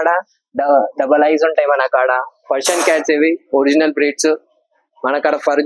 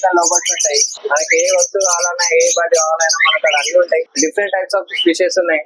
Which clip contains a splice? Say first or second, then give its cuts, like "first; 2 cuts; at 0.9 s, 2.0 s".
second; 2 cuts; at 0.9 s, 4.1 s